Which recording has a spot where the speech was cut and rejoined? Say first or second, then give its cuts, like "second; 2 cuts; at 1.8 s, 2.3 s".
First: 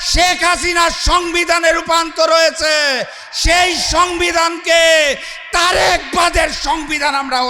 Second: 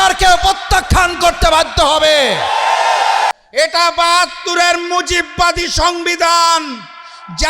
second; 1 cut; at 3.3 s